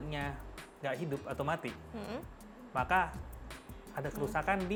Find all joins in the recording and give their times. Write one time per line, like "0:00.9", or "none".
none

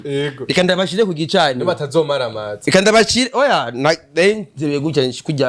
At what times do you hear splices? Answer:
none

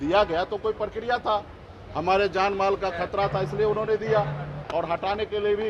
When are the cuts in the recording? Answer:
0:04.6

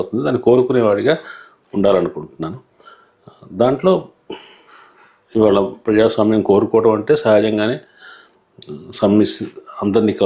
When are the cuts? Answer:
none

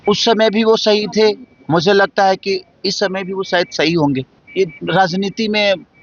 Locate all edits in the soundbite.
0:04.4

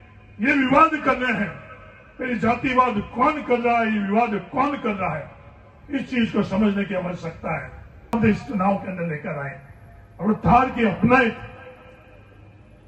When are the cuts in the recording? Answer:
0:08.1

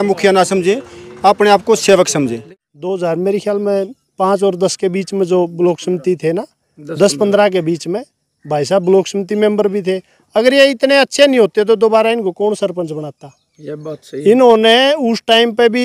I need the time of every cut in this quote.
0:02.5

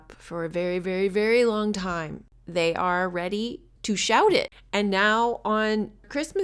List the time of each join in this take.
0:04.6

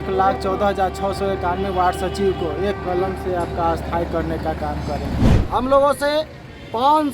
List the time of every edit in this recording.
0:05.3

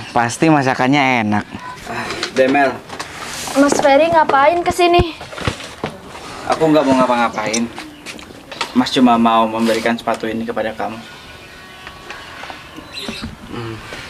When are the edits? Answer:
0:02.2
0:13.1

